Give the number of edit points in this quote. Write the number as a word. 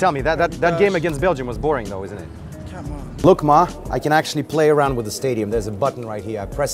one